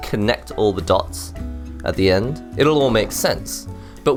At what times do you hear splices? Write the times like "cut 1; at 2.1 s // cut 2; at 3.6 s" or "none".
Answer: none